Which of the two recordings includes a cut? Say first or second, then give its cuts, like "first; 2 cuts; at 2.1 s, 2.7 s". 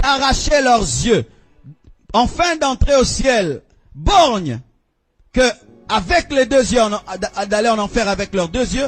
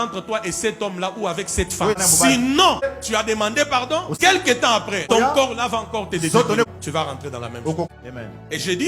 second; 6 cuts; at 2.0 s, 2.9 s, 4.2 s, 5.1 s, 6.7 s, 7.9 s